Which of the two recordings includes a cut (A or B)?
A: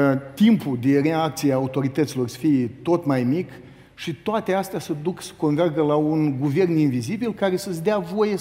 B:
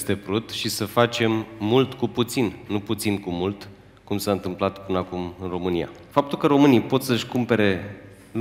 B